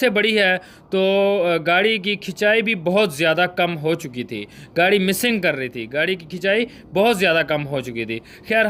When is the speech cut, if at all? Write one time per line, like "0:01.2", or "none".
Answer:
none